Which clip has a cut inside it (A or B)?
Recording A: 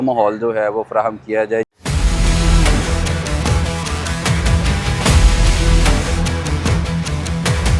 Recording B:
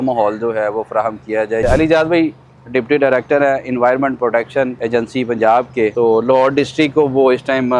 B